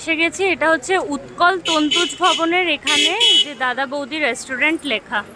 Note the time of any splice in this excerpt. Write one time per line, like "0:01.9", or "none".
none